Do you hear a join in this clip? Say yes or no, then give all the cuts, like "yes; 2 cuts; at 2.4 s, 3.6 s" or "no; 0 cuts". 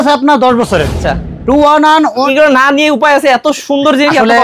yes; 2 cuts; at 1.0 s, 2.3 s